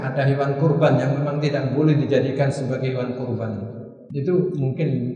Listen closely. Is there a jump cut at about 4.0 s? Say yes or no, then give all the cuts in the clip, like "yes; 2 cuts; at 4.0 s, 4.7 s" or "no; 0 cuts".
yes; 1 cut; at 4.0 s